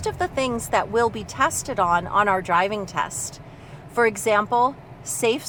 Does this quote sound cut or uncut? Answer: uncut